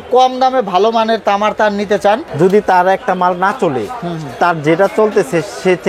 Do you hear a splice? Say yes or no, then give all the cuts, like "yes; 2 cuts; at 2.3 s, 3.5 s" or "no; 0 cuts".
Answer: yes; 1 cut; at 2.3 s